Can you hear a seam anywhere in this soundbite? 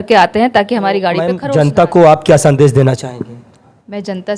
yes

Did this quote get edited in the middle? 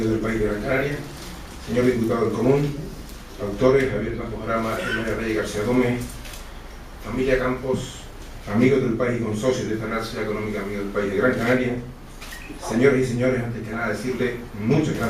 yes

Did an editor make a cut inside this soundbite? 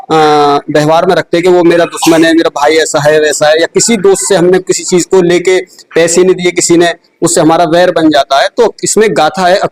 no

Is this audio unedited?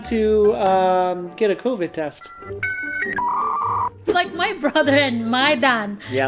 no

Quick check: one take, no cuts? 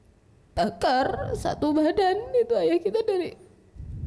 yes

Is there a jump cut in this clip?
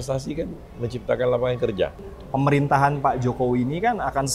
yes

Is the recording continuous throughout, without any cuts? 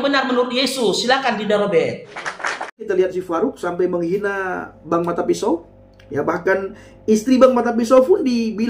no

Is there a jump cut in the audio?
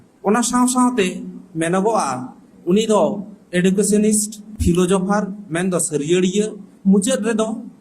yes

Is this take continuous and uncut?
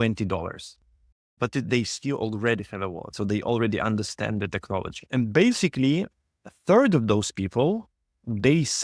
no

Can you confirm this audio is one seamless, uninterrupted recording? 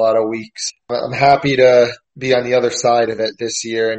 no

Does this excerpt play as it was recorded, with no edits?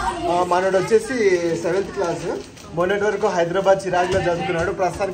yes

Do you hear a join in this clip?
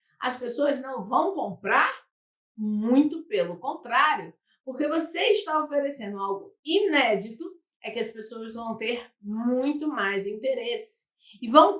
no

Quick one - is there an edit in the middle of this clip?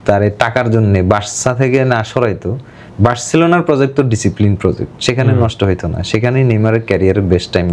no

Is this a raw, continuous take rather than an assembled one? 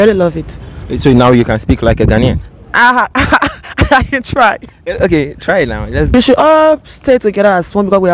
no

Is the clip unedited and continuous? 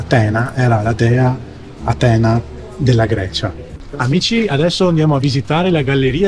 no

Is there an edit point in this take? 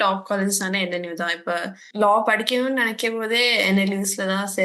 yes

